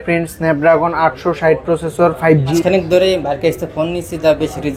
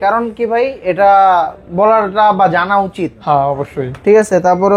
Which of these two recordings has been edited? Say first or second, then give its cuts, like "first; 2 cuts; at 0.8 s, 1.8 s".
first; 1 cut; at 2.5 s